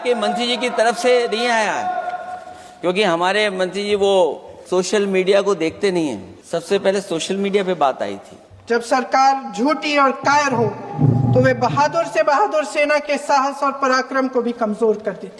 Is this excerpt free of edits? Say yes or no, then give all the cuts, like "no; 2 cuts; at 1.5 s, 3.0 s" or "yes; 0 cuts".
no; 3 cuts; at 4.5 s, 6.3 s, 8.5 s